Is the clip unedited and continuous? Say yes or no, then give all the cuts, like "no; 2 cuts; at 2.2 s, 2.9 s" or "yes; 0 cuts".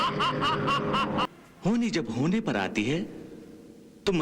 no; 1 cut; at 1.3 s